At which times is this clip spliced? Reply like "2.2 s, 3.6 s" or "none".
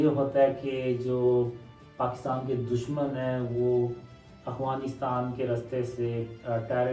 none